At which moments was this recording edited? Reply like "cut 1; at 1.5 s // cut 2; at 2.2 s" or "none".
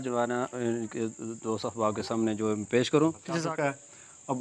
cut 1; at 3.2 s